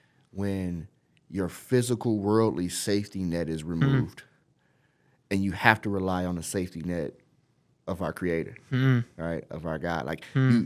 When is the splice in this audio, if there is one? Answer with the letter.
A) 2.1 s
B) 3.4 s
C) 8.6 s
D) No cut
D